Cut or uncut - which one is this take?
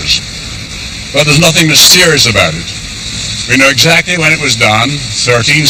uncut